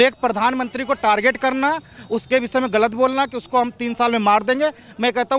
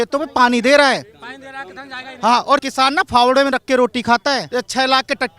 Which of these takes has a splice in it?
second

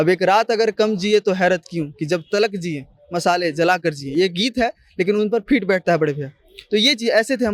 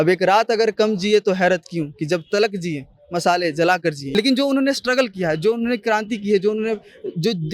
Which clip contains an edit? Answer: second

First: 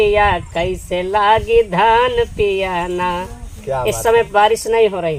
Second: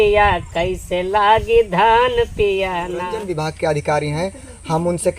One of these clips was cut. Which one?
second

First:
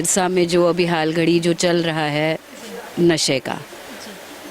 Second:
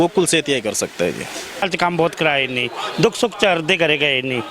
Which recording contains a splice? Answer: second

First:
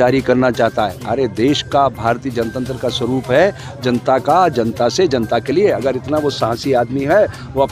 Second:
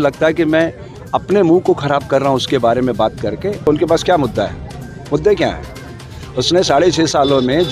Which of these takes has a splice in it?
second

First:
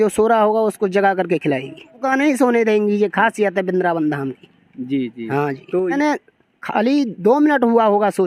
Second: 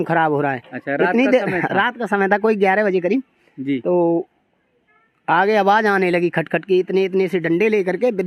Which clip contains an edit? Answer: first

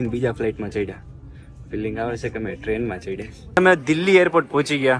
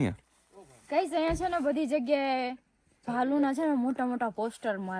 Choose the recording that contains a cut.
first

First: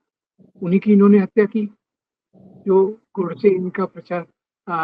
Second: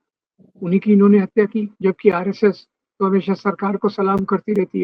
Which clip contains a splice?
second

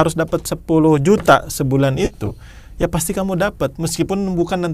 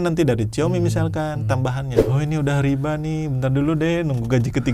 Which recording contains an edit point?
second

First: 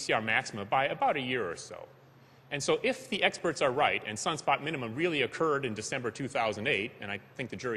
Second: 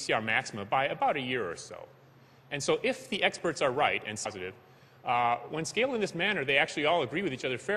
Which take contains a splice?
first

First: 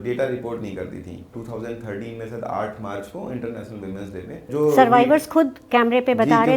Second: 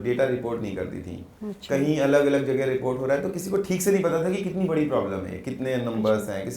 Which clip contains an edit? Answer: first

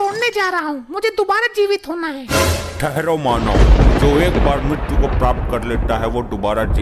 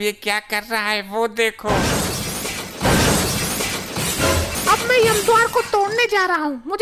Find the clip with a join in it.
second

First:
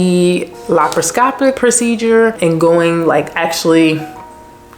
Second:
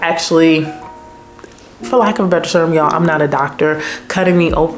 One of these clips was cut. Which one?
first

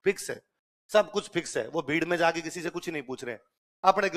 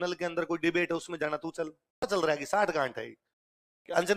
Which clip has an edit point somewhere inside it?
second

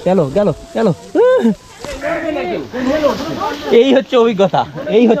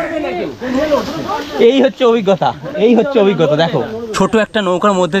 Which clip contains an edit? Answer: second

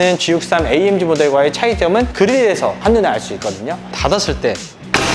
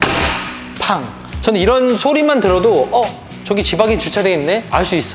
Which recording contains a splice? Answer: first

